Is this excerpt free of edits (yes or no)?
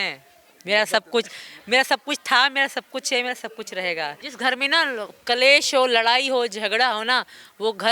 no